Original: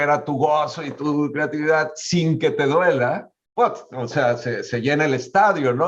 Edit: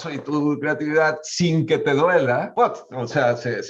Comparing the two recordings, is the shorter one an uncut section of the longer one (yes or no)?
no